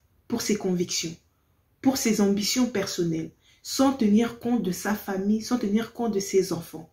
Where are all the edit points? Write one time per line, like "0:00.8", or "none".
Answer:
none